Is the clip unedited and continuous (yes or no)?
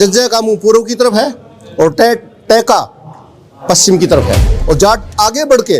no